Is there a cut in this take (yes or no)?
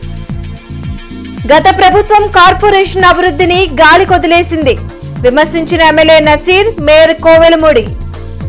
no